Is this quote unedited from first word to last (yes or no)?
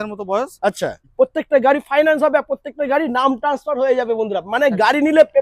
no